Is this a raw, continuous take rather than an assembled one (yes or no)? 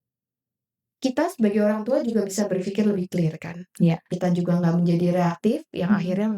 no